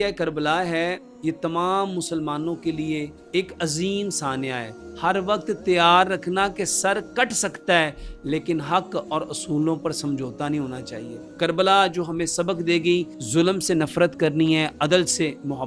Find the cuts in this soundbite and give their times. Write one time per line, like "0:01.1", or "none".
0:03.2
0:04.8
0:11.2
0:13.2